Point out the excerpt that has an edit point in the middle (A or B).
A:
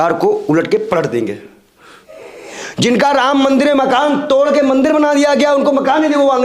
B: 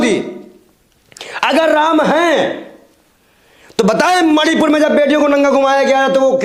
A